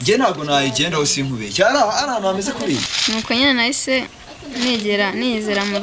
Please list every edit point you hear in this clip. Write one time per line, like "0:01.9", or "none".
0:02.9